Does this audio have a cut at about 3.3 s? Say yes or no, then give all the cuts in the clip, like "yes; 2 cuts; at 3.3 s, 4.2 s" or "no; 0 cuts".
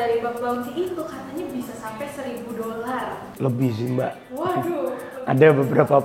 yes; 1 cut; at 3.3 s